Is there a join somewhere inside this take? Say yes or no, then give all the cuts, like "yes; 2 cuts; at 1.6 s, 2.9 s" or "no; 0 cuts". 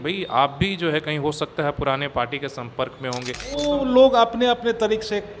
yes; 1 cut; at 3.5 s